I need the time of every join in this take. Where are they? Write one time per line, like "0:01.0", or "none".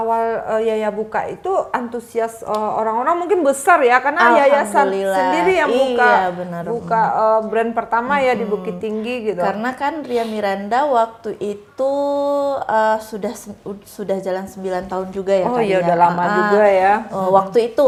none